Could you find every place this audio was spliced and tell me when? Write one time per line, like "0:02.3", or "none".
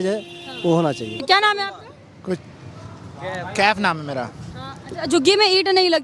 0:01.1